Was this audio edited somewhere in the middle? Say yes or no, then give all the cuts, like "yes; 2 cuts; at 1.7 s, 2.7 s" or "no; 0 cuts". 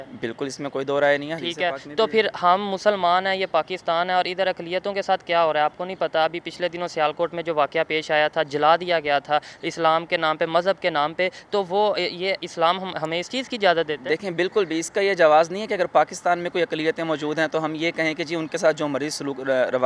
no; 0 cuts